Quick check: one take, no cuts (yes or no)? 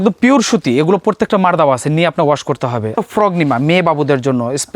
no